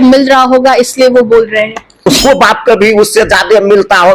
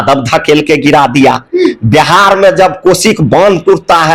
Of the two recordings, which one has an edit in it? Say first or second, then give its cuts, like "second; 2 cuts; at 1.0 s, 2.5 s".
first; 1 cut; at 2.1 s